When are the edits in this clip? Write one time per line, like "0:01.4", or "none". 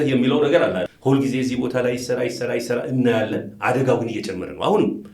0:00.9